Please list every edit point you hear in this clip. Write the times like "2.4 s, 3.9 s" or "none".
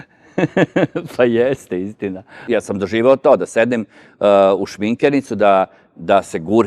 2.4 s